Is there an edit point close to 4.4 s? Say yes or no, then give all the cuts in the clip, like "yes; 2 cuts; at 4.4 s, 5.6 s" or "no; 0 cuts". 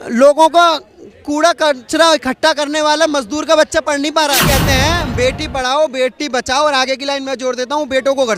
yes; 1 cut; at 4.4 s